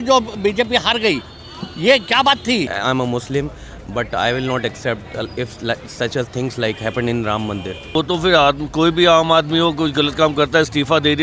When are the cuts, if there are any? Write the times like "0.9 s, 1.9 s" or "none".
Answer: 2.7 s, 7.9 s